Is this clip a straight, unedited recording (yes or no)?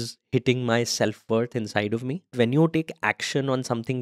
no